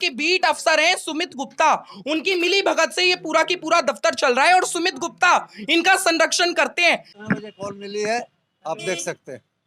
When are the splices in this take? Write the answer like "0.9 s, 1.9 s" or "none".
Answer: 7.1 s